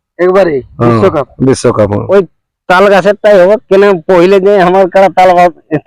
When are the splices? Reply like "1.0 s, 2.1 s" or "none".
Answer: 2.0 s